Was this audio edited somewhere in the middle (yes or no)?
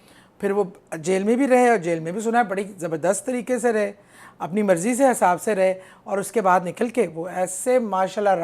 no